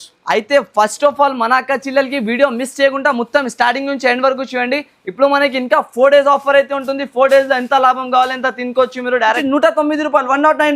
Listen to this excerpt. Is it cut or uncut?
cut